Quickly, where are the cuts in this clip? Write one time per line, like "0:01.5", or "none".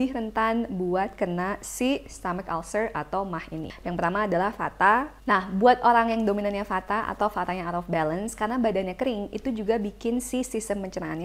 0:03.7
0:05.1

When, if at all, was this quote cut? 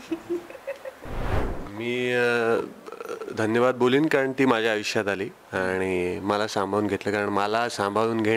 0:01.4

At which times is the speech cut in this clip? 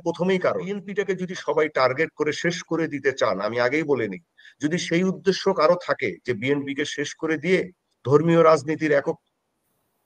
0:00.9

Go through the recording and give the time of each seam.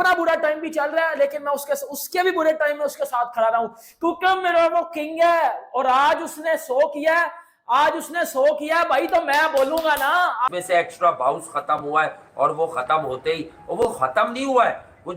0:10.5

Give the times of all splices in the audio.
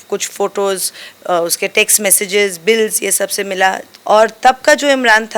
0:03.9

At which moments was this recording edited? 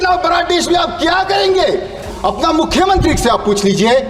0:02.0

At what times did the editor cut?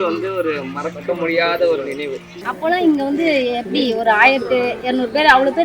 0:02.1

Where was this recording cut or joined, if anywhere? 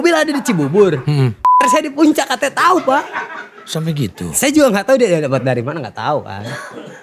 none

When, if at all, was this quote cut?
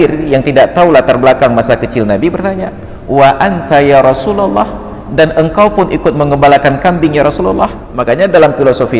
0:07.9

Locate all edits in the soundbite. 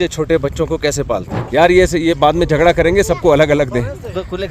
0:01.4

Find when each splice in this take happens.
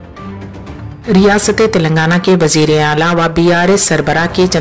0:01.0

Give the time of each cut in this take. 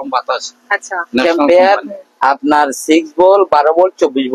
0:01.2

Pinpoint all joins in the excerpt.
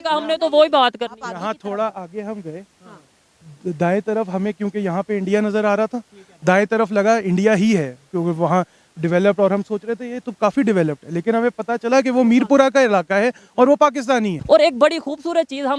0:14.4

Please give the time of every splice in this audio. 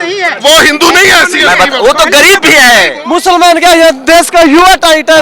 0:02.9

